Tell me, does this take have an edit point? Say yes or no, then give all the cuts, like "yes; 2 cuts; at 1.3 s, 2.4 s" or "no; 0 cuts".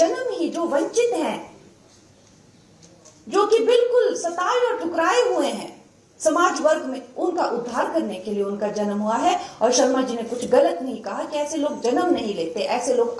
no; 0 cuts